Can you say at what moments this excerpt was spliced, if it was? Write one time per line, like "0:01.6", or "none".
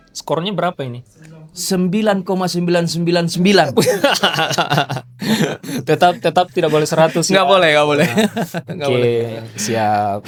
none